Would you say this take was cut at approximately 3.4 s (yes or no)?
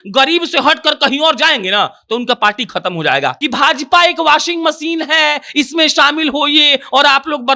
yes